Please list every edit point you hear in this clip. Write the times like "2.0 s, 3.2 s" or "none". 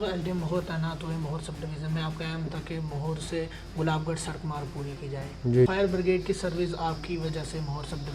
5.7 s